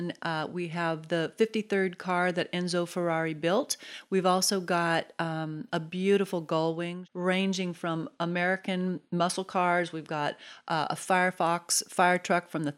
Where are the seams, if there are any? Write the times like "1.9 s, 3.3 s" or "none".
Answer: 3.9 s, 7.0 s

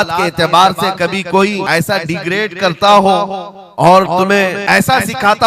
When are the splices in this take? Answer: 1.6 s, 4.6 s

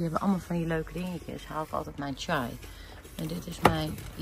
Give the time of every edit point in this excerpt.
none

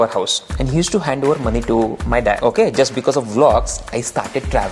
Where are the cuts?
2.4 s

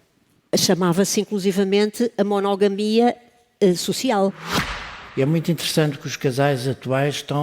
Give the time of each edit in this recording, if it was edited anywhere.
4.7 s

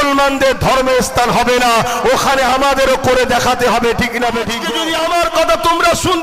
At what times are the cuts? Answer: 4.6 s

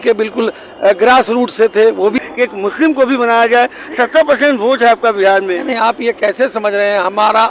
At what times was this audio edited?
2.2 s

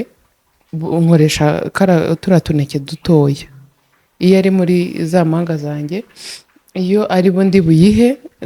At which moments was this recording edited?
none

